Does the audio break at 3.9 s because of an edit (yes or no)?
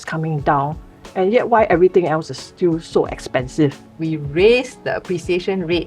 yes